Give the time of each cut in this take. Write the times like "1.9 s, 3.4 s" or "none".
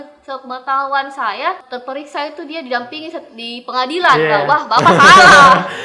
1.7 s